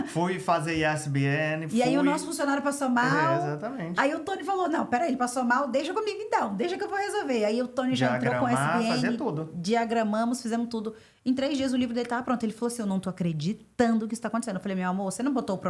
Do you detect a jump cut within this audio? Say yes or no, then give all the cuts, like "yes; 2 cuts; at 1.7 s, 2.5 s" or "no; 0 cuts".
no; 0 cuts